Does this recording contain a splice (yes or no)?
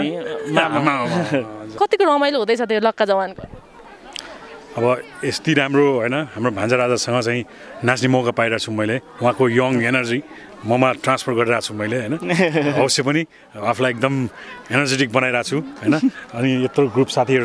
no